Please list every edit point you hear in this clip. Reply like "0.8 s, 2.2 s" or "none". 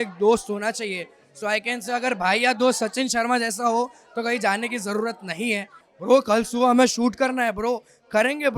5.9 s